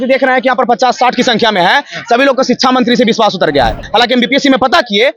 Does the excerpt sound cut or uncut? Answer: cut